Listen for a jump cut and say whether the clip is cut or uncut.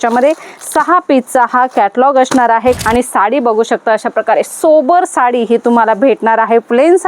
cut